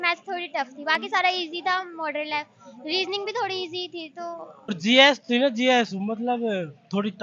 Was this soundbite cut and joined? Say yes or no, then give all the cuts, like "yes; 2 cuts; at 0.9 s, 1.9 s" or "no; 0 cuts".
yes; 1 cut; at 4.8 s